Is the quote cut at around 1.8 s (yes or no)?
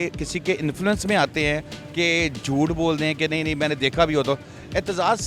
no